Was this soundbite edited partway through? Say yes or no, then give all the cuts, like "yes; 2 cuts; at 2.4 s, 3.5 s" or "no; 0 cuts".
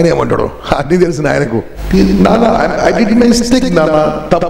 yes; 1 cut; at 1.8 s